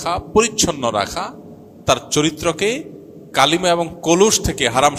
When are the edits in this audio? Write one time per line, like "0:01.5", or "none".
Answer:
none